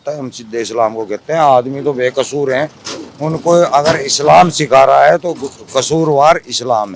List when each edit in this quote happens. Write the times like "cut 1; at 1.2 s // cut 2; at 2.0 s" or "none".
none